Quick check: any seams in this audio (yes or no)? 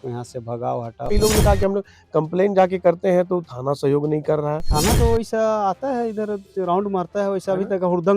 yes